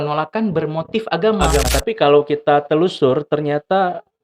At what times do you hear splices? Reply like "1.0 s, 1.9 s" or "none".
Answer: 1.7 s